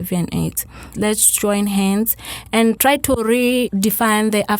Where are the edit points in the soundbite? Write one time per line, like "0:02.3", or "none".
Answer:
0:00.9
0:02.8
0:03.7